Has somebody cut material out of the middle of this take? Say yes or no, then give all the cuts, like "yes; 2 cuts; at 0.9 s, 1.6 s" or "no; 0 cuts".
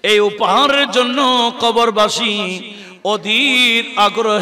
no; 0 cuts